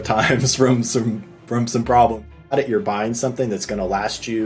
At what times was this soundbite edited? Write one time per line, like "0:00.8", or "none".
0:02.3